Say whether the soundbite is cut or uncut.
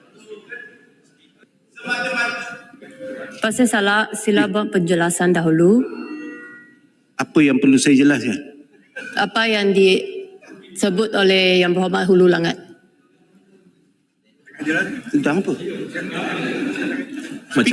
cut